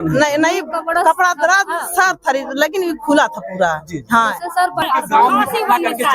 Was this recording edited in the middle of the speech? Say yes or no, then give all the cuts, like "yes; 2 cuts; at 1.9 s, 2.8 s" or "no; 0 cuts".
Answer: yes; 1 cut; at 4.9 s